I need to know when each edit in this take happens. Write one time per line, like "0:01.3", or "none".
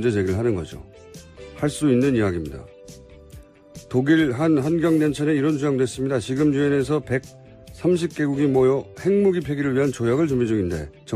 none